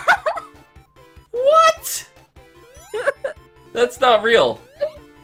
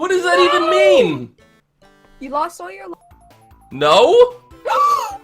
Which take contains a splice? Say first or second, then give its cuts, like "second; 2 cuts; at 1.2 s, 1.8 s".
second; 1 cut; at 2.9 s